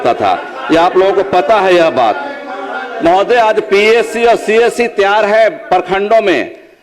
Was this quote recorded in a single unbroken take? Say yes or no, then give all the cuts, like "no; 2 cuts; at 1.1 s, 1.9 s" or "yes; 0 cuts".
yes; 0 cuts